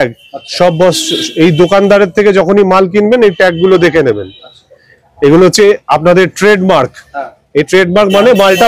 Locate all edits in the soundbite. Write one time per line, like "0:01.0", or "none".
none